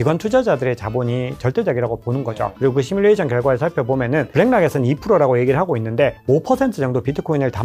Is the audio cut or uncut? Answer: cut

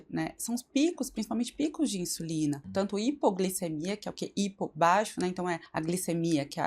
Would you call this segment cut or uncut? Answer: cut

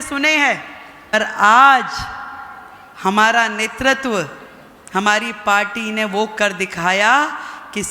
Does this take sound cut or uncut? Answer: cut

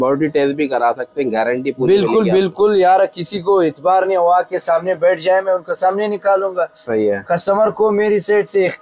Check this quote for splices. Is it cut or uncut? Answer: uncut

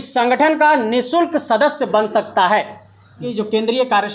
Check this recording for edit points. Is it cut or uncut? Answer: cut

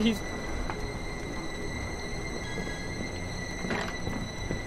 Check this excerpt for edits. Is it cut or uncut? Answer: cut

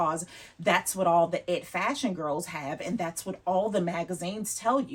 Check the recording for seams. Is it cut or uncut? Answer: uncut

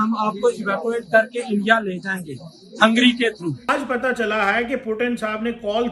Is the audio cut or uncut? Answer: cut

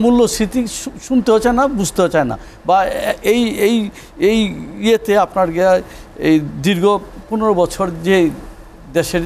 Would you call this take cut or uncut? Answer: uncut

